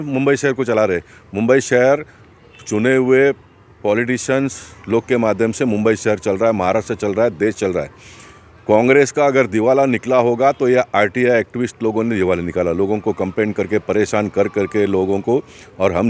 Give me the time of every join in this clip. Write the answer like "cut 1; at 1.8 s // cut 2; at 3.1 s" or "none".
none